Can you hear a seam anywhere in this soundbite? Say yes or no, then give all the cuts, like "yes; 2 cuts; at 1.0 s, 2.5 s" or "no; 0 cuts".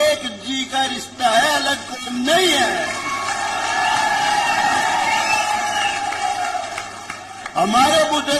no; 0 cuts